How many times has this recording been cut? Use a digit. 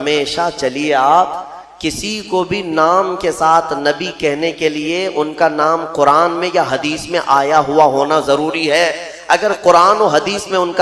0